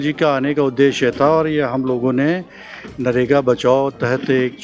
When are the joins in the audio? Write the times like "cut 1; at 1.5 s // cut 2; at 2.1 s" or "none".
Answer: none